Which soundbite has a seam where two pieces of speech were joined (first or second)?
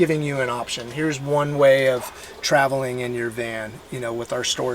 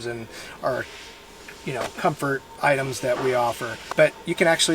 second